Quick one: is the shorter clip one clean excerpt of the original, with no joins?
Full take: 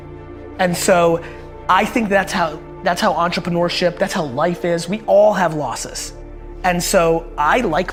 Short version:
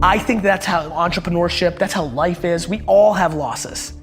no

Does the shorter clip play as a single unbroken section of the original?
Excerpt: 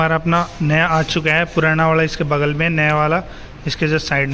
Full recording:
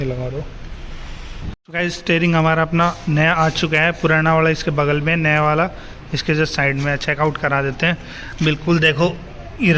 yes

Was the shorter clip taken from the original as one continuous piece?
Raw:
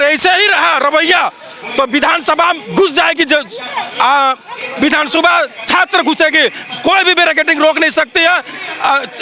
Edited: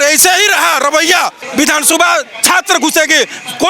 no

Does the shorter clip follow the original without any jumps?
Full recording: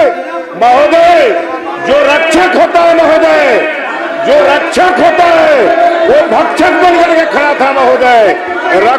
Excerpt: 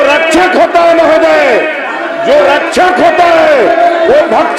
yes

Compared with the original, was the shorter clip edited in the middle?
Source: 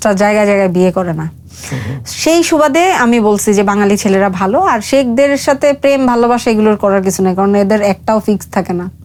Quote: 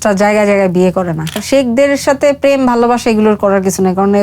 yes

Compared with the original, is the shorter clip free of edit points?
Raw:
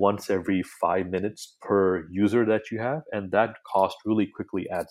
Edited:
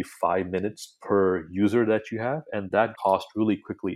no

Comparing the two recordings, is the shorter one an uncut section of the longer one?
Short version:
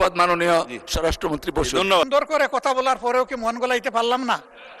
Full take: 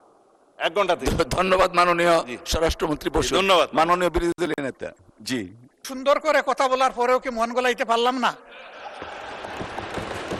no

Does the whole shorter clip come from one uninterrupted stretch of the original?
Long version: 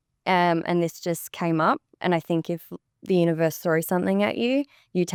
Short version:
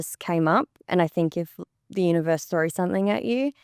yes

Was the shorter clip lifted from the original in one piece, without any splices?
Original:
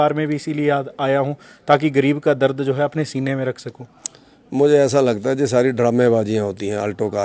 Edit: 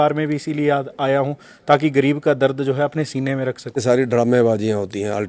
no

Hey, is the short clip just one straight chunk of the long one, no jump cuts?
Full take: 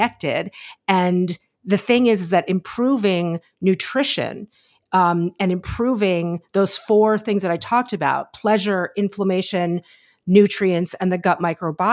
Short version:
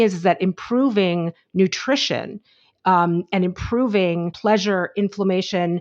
no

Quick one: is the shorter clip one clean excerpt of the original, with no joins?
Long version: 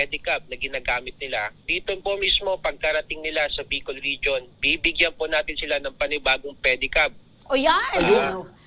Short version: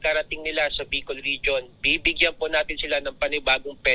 yes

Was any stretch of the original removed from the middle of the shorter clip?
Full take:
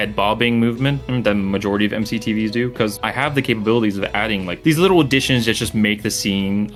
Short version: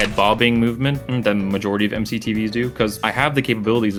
no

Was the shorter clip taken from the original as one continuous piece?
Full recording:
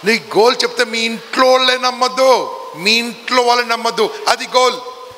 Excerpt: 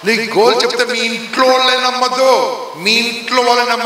yes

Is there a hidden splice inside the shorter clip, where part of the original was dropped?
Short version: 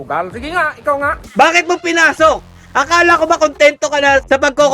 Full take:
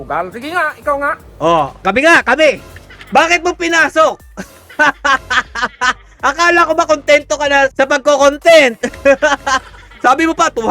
yes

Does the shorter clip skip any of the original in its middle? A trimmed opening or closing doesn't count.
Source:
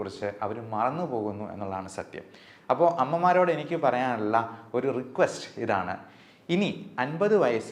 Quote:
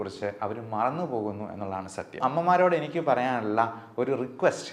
yes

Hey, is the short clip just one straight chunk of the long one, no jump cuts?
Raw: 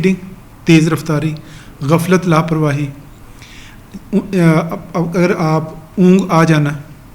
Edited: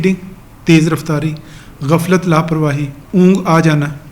no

